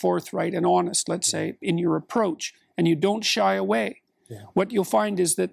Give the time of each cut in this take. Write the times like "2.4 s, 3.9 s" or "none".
none